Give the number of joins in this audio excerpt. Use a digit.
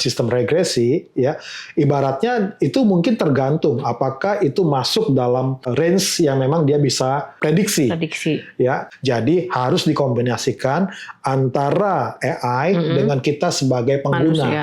3